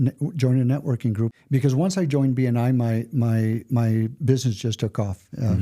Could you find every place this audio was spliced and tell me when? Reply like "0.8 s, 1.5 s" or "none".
1.3 s